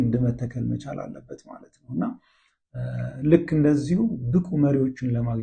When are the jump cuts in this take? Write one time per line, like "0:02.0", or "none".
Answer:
none